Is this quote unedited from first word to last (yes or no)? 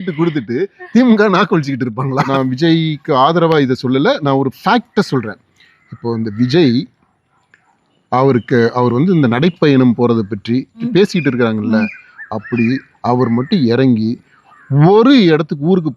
no